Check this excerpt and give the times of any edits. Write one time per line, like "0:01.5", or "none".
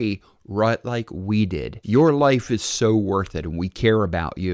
0:01.7